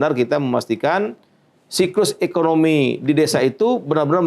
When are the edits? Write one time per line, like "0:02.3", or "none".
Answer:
none